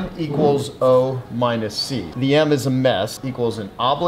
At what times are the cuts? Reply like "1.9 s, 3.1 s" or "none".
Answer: none